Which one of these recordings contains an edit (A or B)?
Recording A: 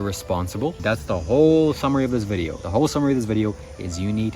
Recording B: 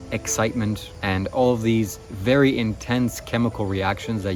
A